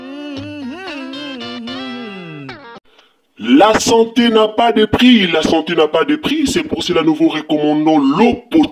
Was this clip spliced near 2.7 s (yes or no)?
yes